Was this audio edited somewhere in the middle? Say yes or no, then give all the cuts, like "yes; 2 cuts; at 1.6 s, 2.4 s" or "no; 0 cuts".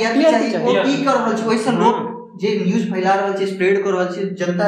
no; 0 cuts